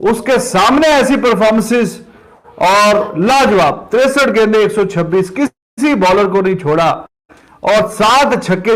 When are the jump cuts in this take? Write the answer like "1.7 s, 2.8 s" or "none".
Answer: none